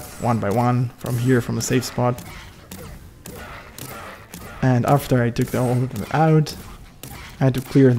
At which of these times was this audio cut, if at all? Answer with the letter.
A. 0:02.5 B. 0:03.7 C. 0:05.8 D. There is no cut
D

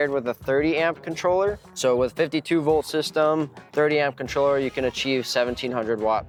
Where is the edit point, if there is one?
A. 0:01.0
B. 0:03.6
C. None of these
C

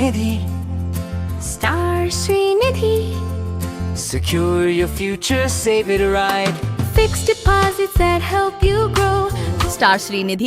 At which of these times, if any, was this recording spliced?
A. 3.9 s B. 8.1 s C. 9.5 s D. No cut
C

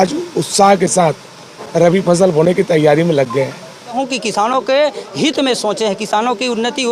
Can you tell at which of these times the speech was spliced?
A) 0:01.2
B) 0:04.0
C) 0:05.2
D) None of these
B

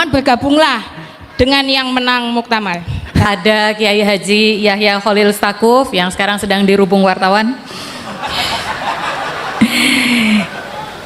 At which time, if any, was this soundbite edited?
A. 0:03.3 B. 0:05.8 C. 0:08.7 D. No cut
A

